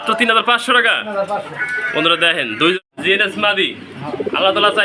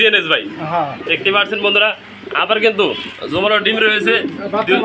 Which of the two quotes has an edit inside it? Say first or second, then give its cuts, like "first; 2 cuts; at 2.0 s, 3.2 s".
first; 1 cut; at 2.8 s